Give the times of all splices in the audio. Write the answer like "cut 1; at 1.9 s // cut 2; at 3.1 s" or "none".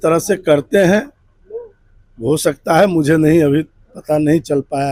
none